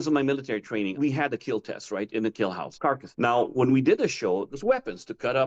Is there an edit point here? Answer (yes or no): yes